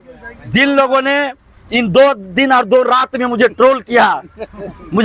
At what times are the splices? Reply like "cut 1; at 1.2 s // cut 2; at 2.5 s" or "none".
none